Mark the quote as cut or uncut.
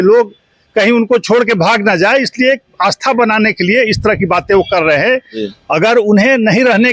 cut